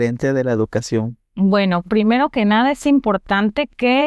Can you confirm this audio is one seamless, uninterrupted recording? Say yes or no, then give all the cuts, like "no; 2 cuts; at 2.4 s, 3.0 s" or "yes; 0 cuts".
yes; 0 cuts